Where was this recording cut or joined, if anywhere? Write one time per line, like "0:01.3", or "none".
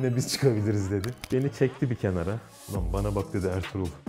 0:01.2